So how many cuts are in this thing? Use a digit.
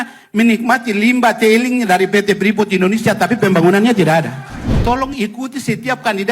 1